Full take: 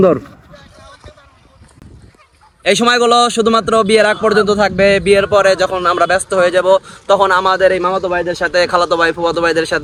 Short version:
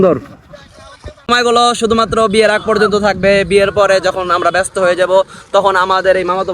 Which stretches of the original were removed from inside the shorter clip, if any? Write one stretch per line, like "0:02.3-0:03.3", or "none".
0:01.3-0:02.8